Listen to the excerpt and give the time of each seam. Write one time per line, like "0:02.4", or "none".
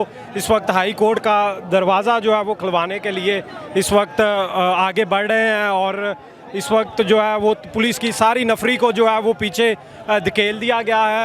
none